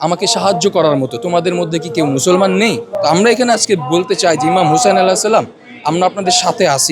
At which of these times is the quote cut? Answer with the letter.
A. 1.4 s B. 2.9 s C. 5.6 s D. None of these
B